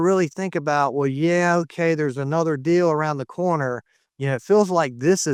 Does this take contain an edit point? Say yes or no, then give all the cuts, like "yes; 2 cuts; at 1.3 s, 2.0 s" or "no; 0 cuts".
no; 0 cuts